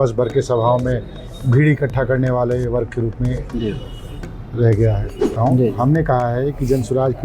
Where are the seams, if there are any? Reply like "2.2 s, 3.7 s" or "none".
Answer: 5.3 s